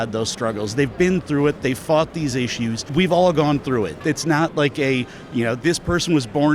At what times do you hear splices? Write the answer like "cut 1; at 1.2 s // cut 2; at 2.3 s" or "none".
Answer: cut 1; at 2.8 s